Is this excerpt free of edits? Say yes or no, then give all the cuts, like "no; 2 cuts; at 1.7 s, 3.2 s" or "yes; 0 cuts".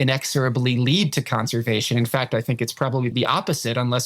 no; 1 cut; at 3.1 s